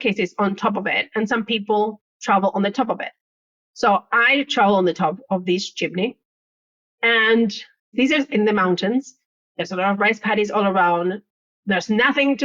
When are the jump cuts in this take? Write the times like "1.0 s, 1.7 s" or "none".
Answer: 7.9 s